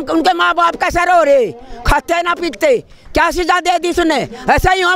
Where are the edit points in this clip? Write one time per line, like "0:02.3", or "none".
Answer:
none